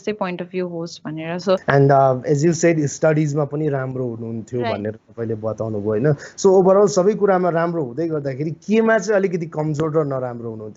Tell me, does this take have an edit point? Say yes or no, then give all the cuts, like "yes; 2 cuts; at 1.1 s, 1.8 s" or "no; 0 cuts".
yes; 1 cut; at 1.6 s